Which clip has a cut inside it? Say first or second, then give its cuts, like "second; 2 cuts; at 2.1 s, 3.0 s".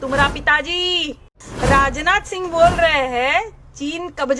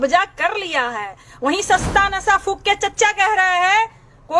first; 1 cut; at 1.4 s